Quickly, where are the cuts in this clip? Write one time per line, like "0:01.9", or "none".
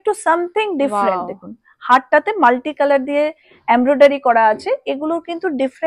none

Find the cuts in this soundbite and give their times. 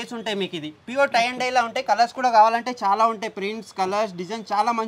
none

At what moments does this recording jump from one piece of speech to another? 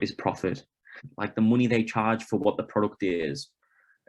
0:01.0

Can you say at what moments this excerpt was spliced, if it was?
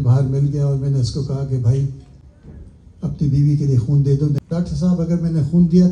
0:04.4

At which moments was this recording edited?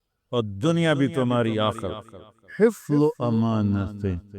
0:02.4

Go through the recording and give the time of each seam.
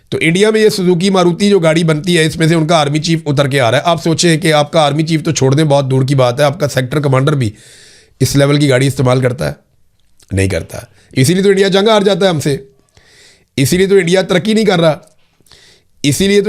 none

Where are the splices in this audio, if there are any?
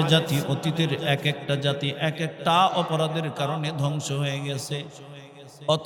none

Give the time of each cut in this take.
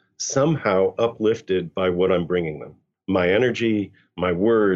none

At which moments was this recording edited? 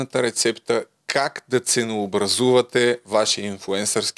none

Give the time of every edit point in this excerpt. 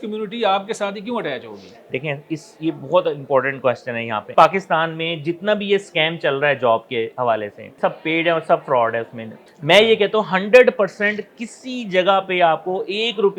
0:04.3
0:07.8
0:09.4

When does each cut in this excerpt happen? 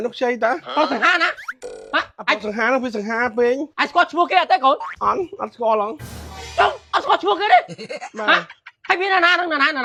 none

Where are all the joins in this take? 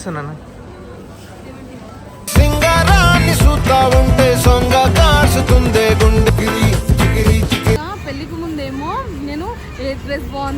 0:07.8

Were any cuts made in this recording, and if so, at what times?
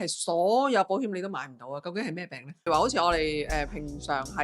0:02.7

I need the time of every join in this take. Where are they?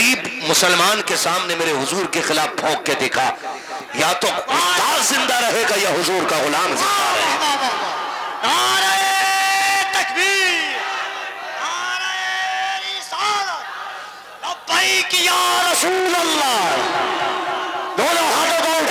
none

